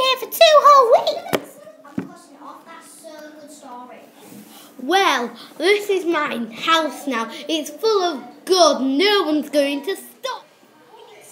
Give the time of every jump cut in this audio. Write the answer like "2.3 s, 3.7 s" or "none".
10.3 s